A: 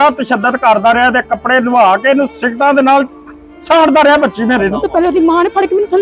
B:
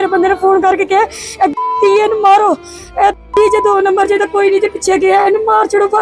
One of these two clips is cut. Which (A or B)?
A